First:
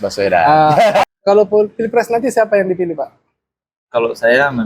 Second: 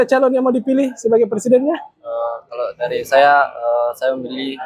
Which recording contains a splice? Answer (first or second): first